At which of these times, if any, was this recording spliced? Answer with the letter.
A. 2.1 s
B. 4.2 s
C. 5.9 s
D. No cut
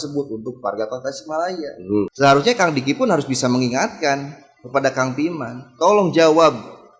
A